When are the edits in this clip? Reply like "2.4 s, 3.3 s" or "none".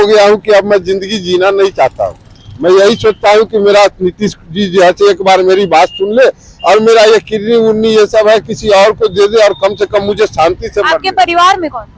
none